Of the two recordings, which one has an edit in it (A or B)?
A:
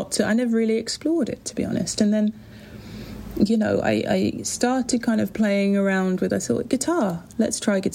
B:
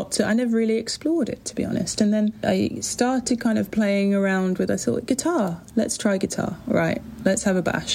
B